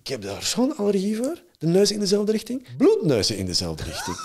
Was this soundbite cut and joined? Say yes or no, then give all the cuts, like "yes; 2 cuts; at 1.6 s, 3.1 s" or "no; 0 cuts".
yes; 1 cut; at 2.6 s